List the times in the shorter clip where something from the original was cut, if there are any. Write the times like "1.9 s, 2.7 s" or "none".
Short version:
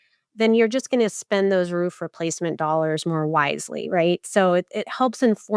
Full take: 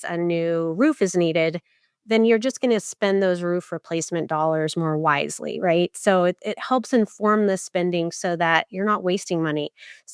none